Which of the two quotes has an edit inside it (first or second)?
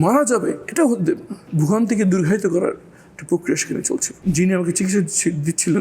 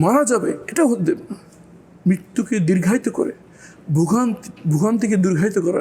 first